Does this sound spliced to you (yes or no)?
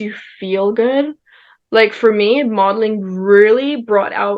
no